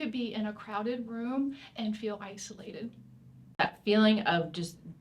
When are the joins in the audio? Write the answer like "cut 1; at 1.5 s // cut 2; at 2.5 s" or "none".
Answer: cut 1; at 3.5 s